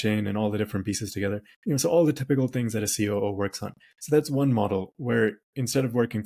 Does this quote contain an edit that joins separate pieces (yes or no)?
no